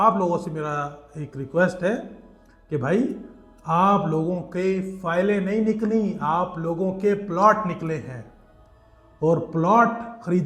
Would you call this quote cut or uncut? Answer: uncut